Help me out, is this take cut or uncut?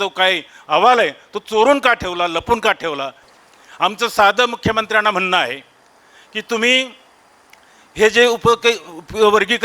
cut